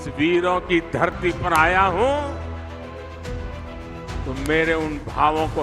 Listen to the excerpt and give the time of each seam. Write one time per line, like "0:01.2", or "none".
0:02.3
0:04.2